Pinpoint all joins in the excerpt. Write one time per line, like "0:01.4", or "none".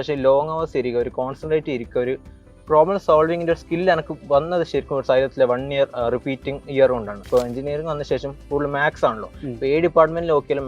0:07.3